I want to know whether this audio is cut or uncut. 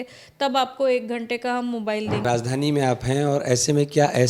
cut